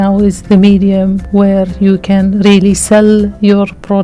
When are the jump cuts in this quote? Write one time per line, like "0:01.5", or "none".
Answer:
none